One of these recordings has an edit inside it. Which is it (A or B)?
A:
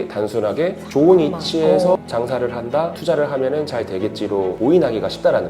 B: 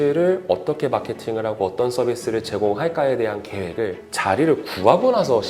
A